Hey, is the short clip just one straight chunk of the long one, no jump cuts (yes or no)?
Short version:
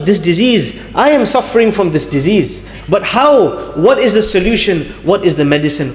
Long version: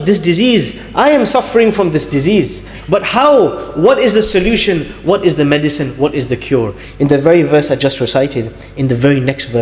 yes